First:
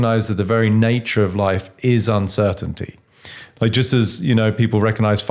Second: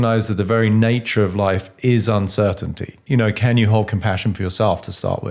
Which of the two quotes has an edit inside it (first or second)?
second